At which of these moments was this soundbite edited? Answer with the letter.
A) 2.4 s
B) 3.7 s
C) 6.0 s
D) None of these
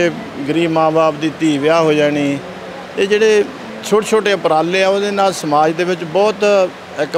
B